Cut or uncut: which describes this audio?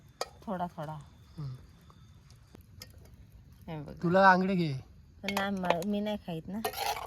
cut